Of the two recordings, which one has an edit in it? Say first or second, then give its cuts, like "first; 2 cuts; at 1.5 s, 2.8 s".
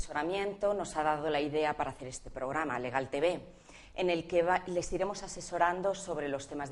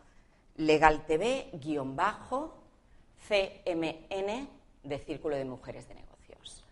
second; 1 cut; at 3.5 s